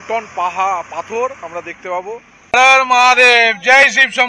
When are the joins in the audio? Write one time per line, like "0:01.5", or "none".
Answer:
0:02.4